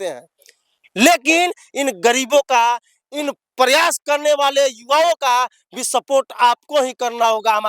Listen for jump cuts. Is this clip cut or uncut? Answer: uncut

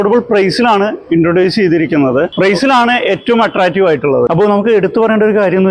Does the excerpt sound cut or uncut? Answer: cut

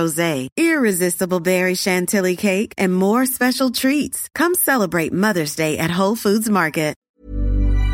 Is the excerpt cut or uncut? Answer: cut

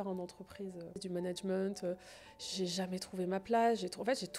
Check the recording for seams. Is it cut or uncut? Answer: cut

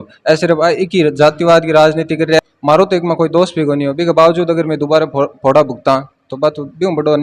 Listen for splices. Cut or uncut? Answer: cut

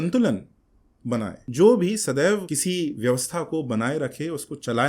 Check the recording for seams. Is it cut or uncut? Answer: cut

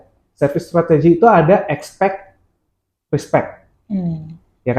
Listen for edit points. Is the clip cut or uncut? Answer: uncut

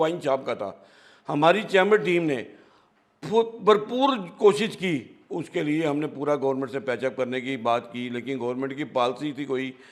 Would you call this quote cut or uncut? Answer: uncut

